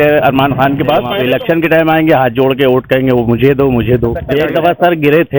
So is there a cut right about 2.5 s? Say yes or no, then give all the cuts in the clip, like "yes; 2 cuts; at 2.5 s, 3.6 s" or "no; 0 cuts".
no; 2 cuts; at 1.1 s, 4.2 s